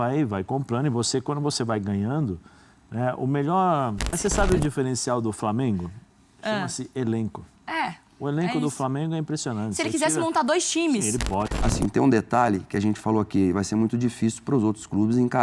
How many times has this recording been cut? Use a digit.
2